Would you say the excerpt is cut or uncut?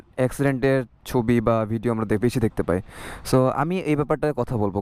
uncut